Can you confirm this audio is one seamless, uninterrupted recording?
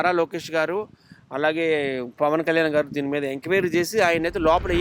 yes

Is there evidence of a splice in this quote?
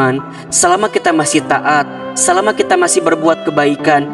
no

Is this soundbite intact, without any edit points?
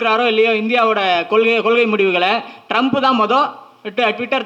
yes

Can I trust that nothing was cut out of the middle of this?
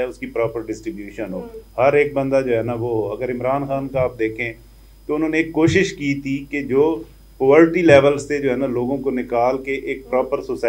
yes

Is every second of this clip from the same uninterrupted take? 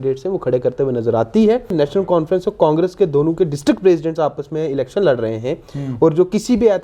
no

